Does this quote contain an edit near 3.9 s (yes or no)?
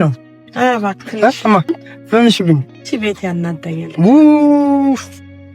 no